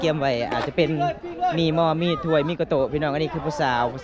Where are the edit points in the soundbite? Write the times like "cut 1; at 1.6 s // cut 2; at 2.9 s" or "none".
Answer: none